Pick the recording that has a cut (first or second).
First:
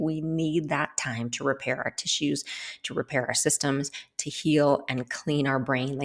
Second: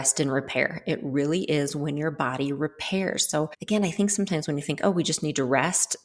second